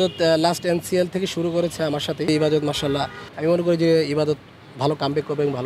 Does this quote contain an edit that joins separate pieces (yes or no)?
yes